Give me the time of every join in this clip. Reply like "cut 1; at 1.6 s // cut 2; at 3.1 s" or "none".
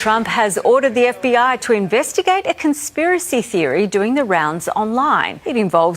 cut 1; at 1.2 s